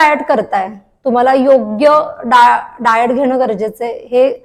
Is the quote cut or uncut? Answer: uncut